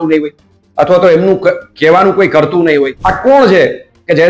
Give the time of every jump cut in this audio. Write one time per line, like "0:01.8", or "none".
0:03.0